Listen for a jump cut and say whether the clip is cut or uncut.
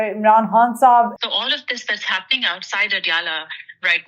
cut